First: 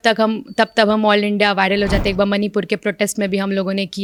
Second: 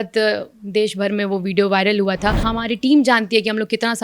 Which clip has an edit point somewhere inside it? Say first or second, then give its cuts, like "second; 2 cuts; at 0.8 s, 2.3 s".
second; 1 cut; at 2.5 s